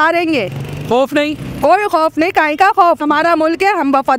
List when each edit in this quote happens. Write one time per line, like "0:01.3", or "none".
0:03.0